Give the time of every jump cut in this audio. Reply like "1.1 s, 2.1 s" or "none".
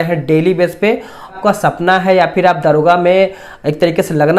1.3 s

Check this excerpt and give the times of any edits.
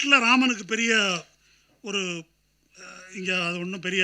none

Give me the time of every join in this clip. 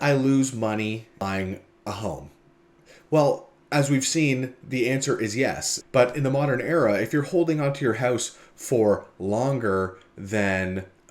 1.2 s, 5.7 s

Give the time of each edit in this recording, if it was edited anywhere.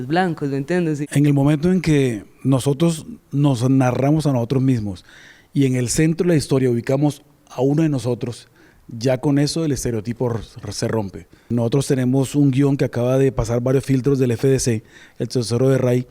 1.0 s, 11.5 s

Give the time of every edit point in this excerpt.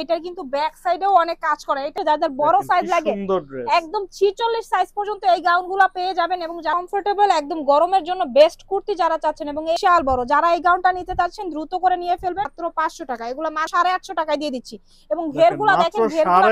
2.0 s, 6.7 s, 9.8 s, 12.5 s, 13.7 s

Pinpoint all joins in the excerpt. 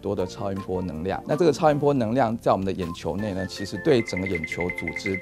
1.2 s, 3.7 s

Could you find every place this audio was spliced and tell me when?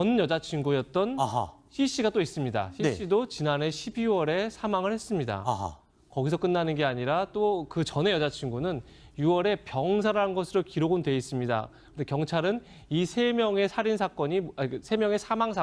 9.7 s

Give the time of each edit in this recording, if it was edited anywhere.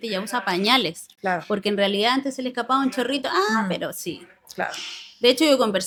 none

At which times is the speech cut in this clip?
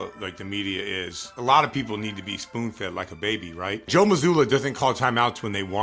1.3 s, 3.9 s

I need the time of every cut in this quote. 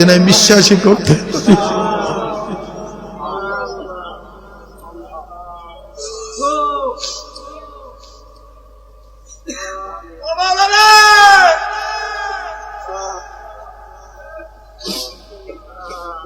none

